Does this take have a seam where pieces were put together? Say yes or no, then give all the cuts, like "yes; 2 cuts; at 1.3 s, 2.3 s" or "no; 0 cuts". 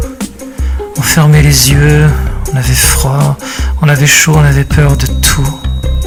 no; 0 cuts